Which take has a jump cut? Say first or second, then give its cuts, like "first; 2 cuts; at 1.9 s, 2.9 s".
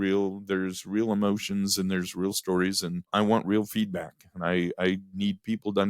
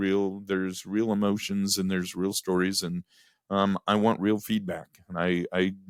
first; 1 cut; at 3.1 s